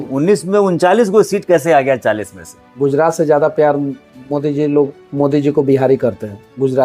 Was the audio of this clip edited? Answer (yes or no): no